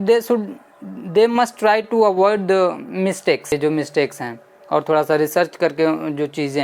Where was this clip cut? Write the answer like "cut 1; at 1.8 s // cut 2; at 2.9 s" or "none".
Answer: cut 1; at 3.5 s